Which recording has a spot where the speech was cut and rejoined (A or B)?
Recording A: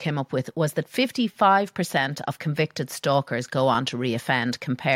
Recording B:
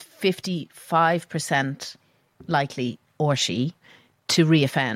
B